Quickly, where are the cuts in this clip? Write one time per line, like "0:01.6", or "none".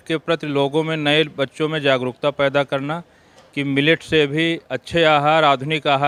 none